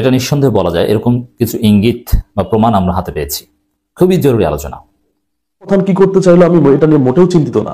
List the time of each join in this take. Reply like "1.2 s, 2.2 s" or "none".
5.7 s